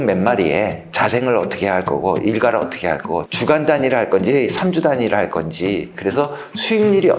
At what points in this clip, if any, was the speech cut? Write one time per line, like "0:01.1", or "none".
none